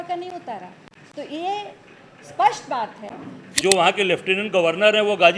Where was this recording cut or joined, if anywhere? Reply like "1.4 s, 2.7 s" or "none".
3.5 s

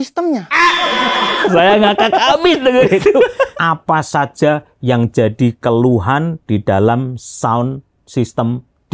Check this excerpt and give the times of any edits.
1.4 s, 3.5 s

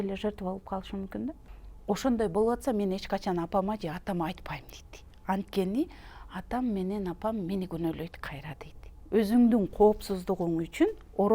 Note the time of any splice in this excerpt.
1.4 s, 8.9 s

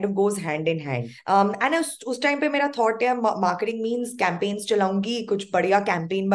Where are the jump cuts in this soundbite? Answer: 1.1 s

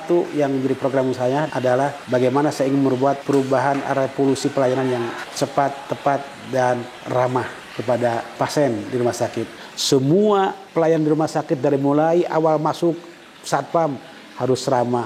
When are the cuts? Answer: 1.7 s, 3.2 s, 5.2 s, 7.3 s, 8.4 s, 9.6 s, 10.6 s

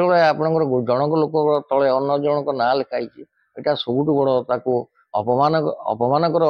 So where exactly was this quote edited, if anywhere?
none

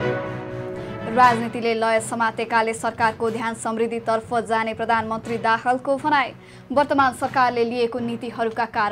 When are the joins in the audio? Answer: 1.0 s

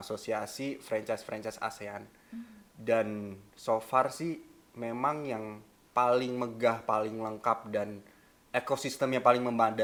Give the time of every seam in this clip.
none

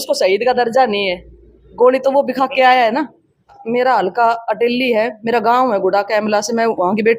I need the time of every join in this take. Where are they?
3.6 s

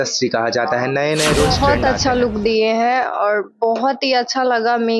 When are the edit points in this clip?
1.5 s

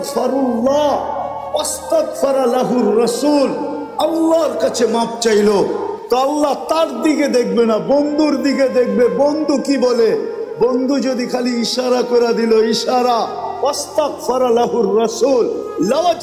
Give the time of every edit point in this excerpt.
none

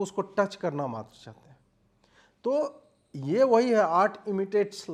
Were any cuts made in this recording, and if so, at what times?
none

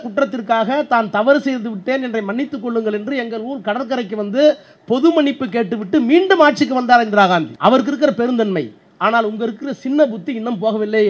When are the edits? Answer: 7.5 s

